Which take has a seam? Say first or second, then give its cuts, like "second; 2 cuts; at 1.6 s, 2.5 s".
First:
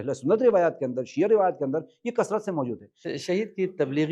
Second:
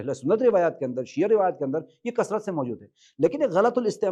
first; 1 cut; at 3.1 s